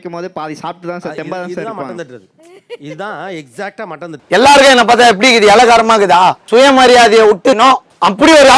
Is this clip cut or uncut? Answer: uncut